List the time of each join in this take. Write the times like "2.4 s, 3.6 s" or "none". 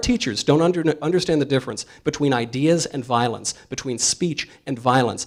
none